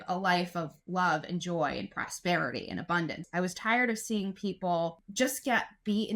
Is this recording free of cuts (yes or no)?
no